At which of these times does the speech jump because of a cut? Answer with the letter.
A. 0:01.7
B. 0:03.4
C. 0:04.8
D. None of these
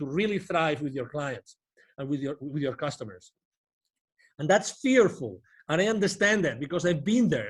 D